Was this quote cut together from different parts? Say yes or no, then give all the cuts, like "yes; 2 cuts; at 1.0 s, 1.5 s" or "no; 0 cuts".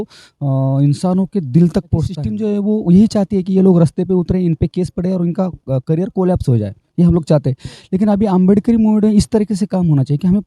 yes; 1 cut; at 2.2 s